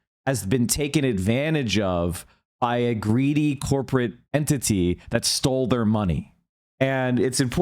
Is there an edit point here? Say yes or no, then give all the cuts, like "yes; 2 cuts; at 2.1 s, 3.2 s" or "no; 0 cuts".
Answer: no; 0 cuts